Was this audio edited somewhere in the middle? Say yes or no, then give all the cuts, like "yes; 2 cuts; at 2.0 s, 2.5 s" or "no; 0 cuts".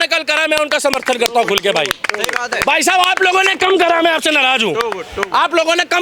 no; 0 cuts